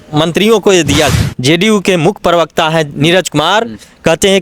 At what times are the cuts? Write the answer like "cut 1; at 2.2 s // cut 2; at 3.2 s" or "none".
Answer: cut 1; at 1.1 s